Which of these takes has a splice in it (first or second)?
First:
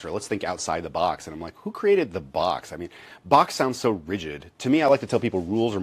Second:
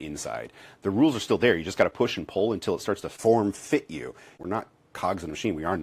second